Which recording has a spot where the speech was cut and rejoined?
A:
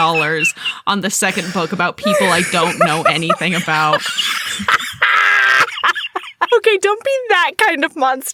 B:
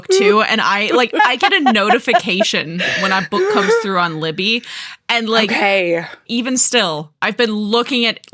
B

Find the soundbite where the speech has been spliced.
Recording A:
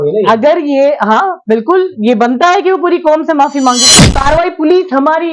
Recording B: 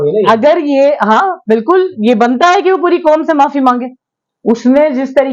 A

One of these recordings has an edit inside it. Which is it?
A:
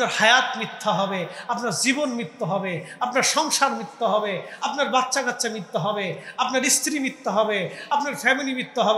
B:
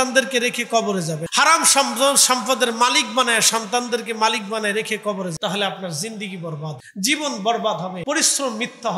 B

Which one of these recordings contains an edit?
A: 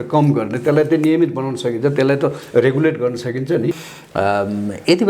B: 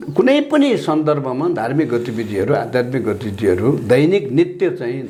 A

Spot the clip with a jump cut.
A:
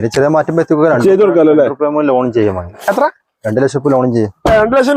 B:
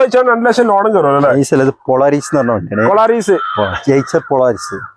B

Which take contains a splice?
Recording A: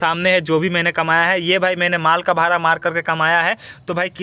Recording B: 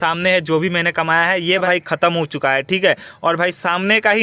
B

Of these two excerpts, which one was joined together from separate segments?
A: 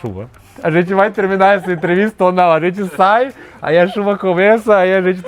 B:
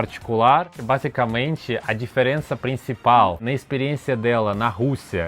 B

